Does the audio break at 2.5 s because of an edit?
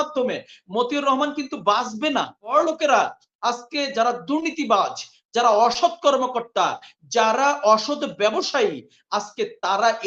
yes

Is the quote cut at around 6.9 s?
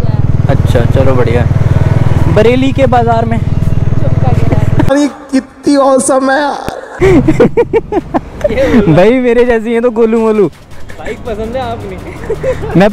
yes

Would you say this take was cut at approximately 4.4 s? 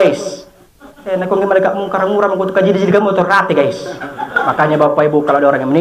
yes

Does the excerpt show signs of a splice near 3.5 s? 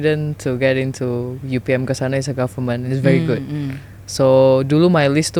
no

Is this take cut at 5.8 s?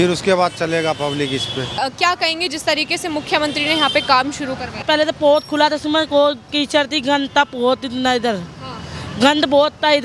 no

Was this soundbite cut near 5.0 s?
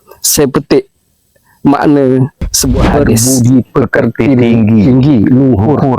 no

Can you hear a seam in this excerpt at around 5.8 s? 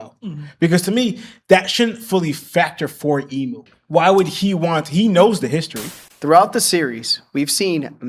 yes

